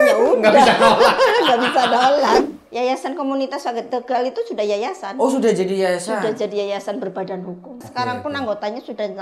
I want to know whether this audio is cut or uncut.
cut